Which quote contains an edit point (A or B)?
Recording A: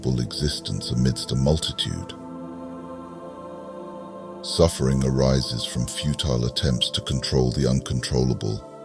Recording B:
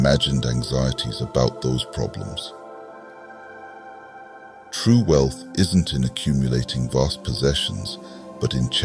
A